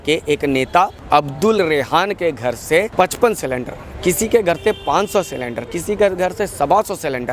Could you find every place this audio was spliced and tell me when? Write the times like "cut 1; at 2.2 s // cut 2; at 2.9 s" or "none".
cut 1; at 1.0 s // cut 2; at 2.9 s